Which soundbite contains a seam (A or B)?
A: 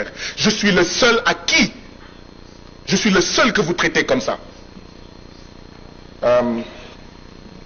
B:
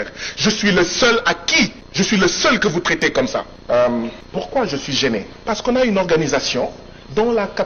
B